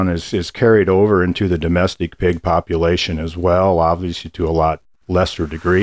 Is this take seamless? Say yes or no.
yes